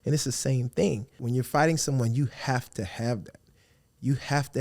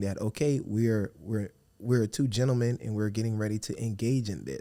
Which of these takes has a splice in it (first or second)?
first